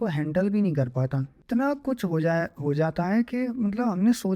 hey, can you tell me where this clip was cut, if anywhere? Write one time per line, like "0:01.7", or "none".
0:01.3

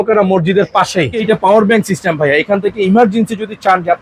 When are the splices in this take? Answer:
0:01.2

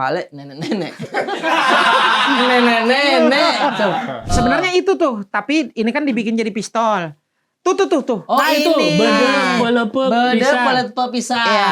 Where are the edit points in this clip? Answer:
0:04.3

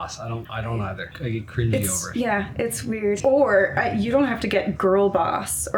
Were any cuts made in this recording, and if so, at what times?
0:00.9
0:03.2

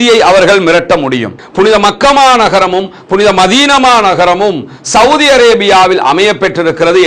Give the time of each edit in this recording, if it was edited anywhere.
0:01.4

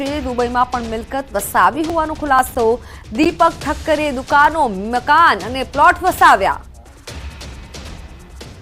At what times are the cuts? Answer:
none

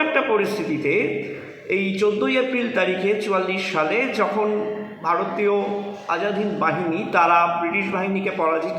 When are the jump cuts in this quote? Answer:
none

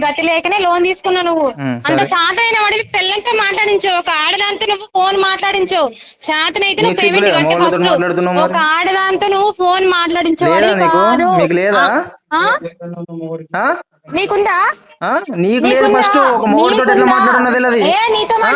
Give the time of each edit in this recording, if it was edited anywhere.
none

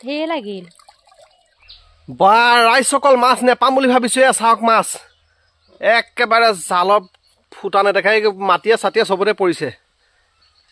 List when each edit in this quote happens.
0:01.8

